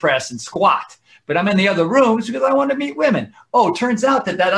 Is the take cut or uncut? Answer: uncut